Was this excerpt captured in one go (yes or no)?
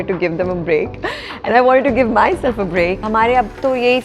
no